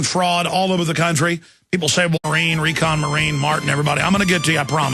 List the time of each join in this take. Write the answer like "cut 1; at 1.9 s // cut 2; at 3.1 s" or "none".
none